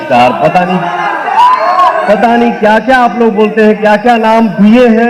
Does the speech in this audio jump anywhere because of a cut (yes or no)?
no